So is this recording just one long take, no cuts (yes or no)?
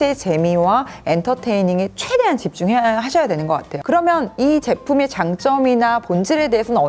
yes